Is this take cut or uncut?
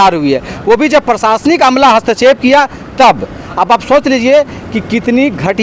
uncut